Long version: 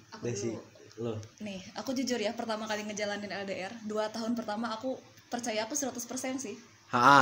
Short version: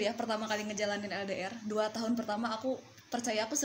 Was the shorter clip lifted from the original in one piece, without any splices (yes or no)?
yes